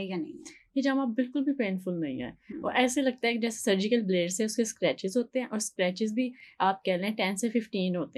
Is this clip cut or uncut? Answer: uncut